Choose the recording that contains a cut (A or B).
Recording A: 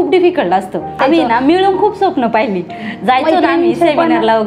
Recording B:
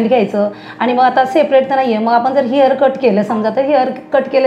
A